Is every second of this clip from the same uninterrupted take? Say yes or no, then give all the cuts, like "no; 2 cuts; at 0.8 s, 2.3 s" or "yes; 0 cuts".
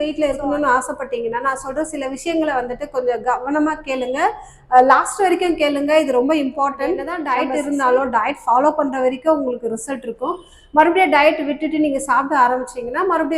no; 1 cut; at 7.1 s